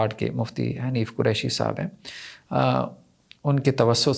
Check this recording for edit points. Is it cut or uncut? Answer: uncut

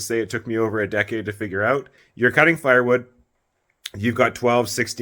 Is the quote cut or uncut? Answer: cut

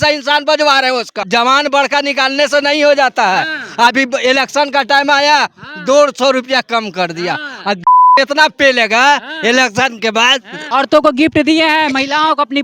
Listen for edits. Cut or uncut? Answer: cut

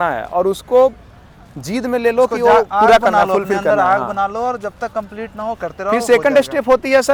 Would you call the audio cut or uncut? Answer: uncut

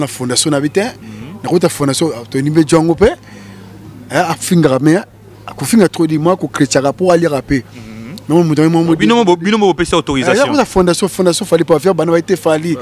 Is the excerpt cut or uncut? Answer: uncut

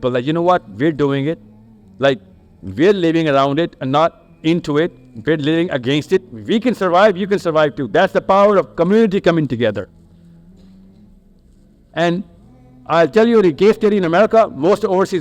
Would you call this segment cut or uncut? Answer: uncut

